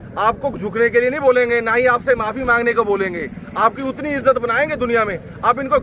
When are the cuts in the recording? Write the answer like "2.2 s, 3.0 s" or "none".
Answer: none